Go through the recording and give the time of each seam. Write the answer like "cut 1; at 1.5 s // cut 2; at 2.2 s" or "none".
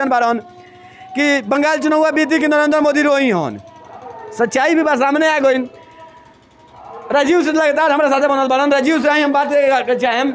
none